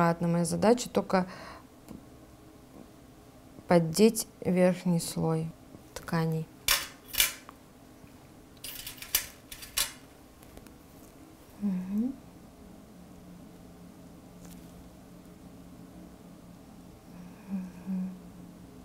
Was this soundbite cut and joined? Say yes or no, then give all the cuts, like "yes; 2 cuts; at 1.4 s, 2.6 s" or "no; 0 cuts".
no; 0 cuts